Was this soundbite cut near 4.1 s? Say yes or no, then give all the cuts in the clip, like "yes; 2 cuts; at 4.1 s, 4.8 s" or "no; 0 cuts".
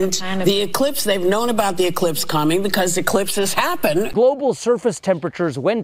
yes; 1 cut; at 4.1 s